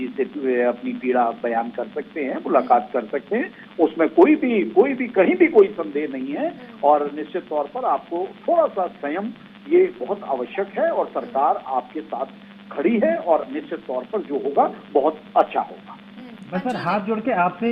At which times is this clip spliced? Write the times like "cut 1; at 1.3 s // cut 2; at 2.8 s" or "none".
none